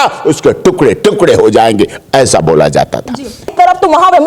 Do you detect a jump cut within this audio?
no; 0 cuts

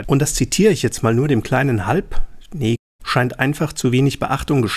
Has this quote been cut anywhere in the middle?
no; 0 cuts

